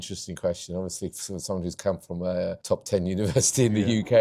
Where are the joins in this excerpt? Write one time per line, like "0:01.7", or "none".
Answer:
none